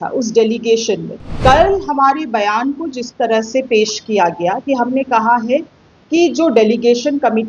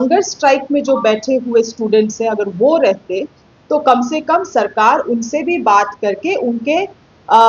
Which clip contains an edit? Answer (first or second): first